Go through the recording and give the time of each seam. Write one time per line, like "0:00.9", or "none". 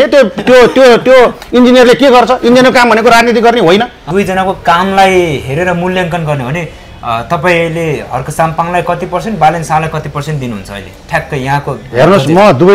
0:04.0